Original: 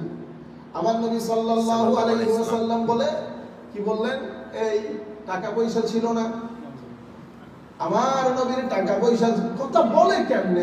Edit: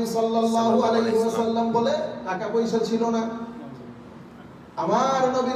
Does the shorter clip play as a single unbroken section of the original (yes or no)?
no